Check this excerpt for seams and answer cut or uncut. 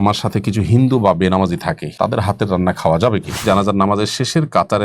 cut